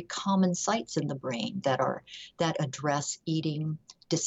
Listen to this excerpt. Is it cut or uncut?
uncut